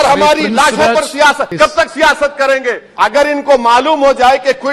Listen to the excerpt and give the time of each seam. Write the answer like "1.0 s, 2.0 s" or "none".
1.5 s, 2.8 s